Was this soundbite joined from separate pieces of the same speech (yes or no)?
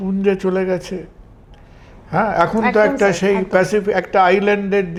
no